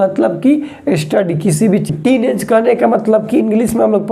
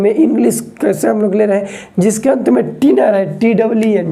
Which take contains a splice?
first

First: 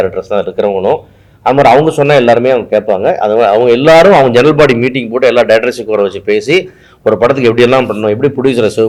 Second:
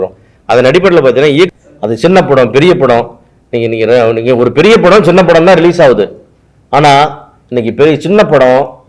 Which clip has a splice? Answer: second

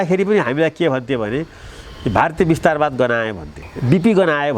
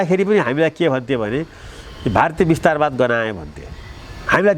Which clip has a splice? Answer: first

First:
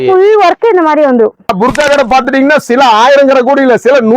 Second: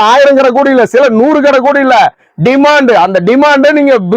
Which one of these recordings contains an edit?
first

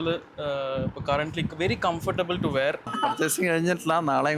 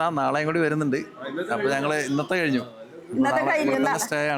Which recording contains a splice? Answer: first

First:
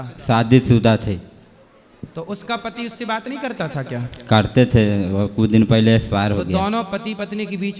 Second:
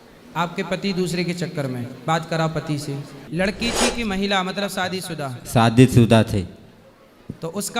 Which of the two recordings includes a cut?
second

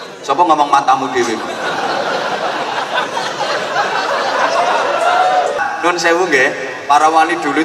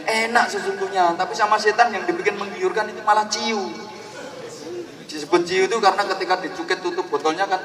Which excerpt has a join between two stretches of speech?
first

